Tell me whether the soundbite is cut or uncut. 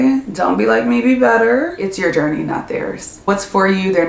cut